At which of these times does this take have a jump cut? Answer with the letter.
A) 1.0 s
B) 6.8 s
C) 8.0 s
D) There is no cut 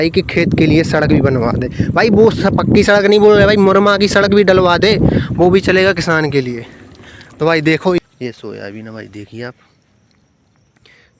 C